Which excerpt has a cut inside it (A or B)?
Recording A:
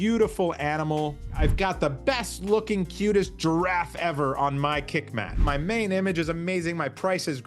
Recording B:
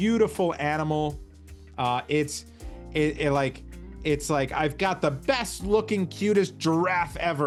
A